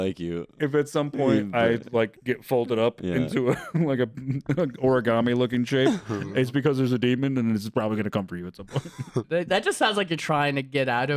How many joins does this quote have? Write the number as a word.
one